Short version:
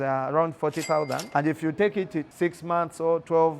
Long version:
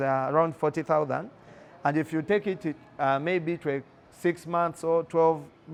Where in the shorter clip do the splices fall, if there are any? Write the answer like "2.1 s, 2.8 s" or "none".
1.2 s, 2.3 s